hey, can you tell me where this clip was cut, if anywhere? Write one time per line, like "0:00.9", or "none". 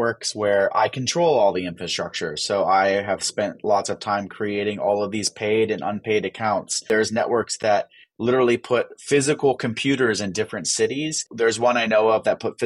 0:06.8
0:11.2